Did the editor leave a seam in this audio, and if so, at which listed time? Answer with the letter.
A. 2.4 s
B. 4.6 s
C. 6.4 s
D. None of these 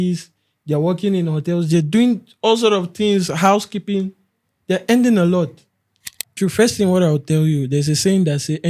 C